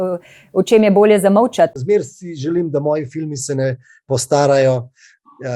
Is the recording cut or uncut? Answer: cut